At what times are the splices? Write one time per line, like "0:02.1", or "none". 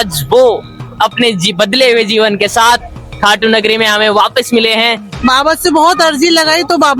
0:05.1